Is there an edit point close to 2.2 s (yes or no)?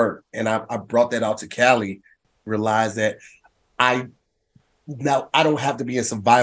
yes